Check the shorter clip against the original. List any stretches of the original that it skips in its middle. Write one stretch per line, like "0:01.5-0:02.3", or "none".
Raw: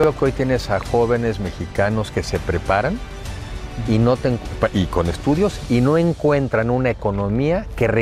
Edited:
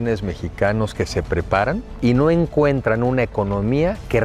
0:03.1-0:05.6